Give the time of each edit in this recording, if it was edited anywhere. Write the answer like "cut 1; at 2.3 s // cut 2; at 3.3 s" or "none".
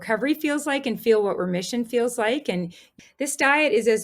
cut 1; at 2.8 s